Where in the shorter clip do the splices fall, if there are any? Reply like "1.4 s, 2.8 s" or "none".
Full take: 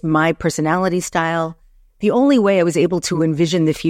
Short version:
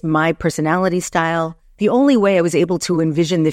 1.6 s